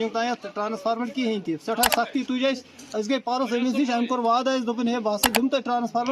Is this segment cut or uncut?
uncut